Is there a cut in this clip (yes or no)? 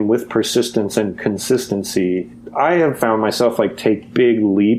no